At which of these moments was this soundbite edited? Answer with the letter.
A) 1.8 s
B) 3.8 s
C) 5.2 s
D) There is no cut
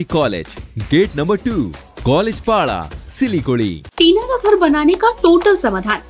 B